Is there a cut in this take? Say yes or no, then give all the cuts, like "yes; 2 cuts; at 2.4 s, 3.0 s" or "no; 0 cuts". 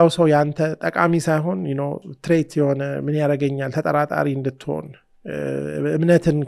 no; 0 cuts